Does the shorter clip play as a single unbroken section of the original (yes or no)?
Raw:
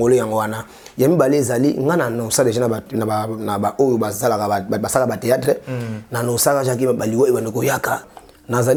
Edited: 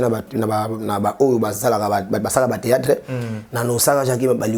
yes